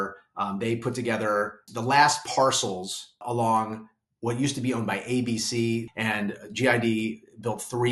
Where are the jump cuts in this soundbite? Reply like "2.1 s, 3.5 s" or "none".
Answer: 1.7 s, 3.2 s, 5.9 s